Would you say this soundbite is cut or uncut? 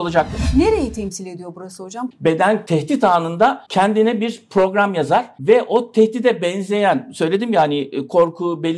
cut